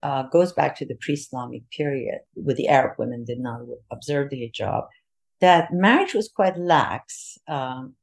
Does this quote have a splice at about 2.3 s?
yes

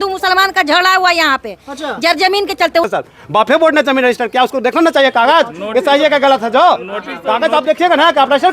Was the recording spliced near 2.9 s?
yes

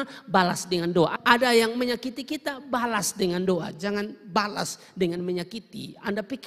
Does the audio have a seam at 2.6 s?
no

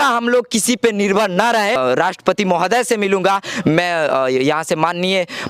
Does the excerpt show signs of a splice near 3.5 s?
no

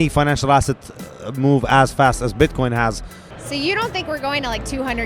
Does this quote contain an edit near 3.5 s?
yes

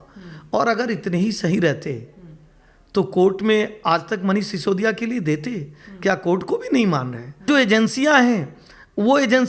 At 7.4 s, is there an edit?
yes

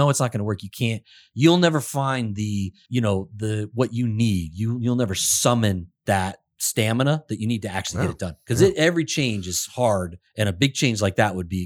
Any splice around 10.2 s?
yes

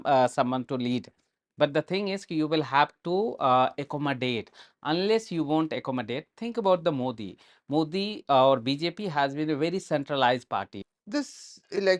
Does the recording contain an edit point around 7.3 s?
no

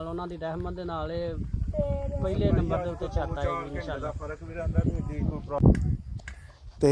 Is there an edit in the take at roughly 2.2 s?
no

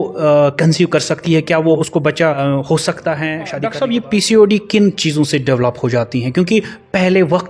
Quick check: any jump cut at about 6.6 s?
no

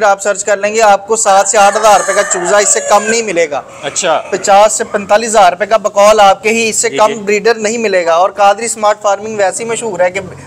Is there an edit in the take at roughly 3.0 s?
no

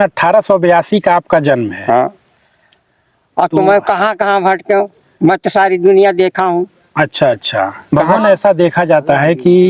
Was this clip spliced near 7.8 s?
yes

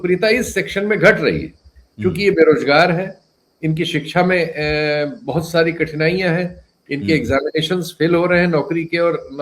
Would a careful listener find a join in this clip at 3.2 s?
no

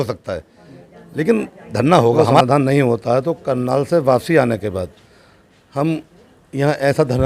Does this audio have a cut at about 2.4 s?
yes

